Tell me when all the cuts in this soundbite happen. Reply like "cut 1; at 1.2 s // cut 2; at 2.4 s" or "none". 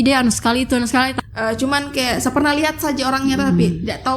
cut 1; at 1.2 s